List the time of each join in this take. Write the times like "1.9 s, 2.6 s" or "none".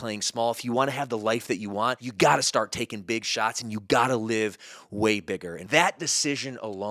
2.0 s, 5.7 s